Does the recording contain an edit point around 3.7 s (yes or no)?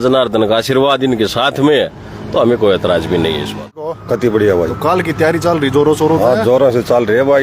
yes